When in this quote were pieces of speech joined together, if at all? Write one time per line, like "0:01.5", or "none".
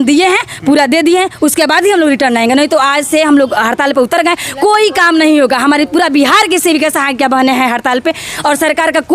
none